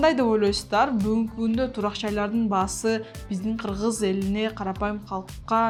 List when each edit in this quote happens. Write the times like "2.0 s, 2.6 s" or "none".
none